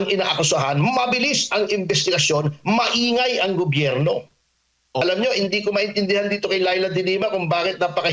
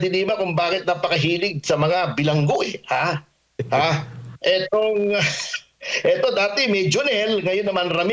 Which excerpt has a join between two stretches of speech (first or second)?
first